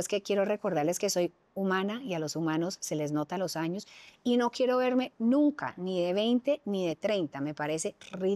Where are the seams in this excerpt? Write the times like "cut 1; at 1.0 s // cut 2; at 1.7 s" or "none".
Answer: none